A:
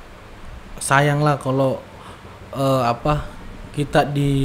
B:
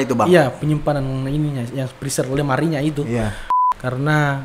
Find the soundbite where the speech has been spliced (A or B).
B